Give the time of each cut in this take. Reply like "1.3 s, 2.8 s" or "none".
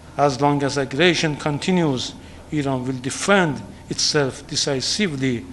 none